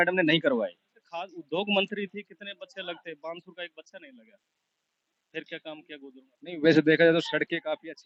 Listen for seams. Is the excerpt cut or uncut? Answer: uncut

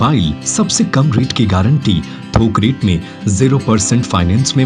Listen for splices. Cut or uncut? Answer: uncut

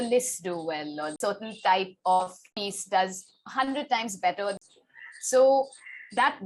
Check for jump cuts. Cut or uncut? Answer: cut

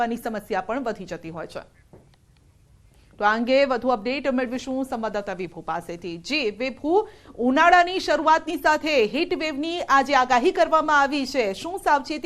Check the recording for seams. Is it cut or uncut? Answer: cut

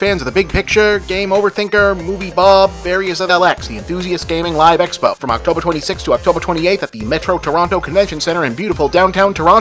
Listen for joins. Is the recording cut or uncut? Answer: cut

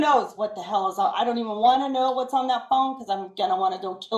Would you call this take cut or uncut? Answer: cut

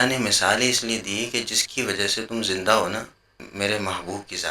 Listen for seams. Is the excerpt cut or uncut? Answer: cut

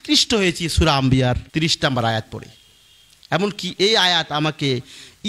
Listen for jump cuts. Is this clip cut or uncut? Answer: cut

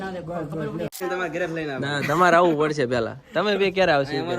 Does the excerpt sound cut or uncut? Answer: cut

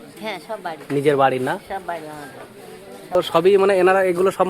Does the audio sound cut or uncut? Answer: cut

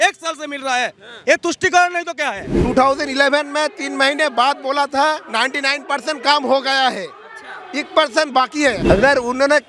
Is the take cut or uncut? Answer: cut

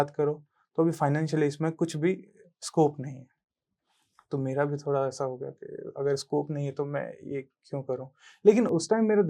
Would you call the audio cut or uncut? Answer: uncut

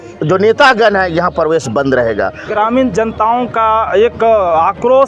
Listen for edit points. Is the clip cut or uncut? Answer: cut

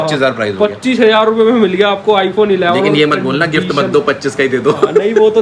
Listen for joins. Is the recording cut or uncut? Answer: uncut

